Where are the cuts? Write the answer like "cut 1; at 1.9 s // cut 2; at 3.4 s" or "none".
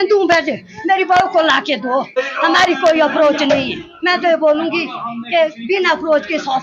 cut 1; at 2.1 s